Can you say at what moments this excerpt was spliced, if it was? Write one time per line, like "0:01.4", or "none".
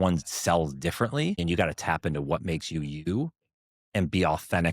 0:01.4